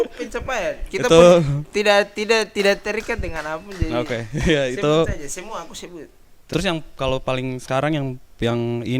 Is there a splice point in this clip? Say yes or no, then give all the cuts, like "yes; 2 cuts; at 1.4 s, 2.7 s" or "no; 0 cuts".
yes; 1 cut; at 6.4 s